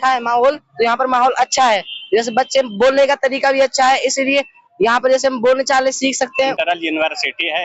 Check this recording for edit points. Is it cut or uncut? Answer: cut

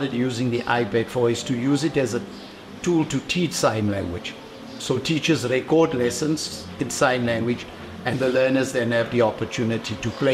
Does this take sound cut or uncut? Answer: uncut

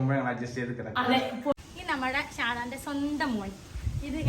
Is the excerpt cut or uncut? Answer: cut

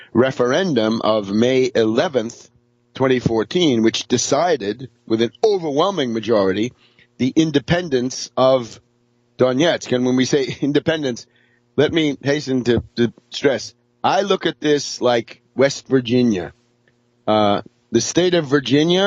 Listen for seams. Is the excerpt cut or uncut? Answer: cut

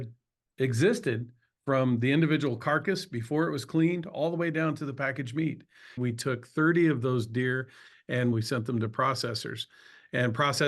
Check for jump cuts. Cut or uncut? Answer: cut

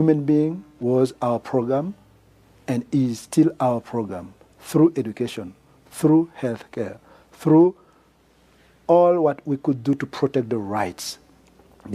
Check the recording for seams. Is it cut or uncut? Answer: uncut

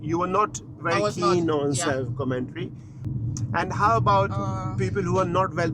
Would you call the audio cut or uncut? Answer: cut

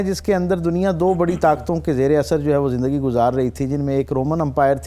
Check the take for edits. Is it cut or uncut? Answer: uncut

